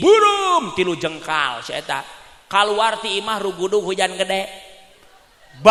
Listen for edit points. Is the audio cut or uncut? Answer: uncut